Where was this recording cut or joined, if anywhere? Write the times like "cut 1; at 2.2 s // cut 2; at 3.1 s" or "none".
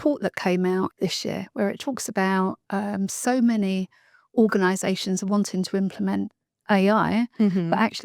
cut 1; at 0.9 s